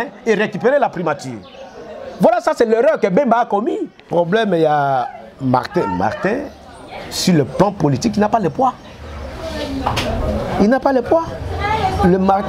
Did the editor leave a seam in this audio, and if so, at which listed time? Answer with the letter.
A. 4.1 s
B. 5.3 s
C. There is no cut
A